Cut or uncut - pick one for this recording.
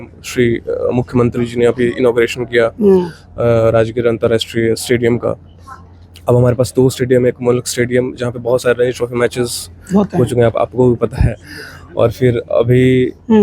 uncut